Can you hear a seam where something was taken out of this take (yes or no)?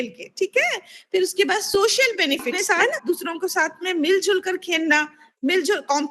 yes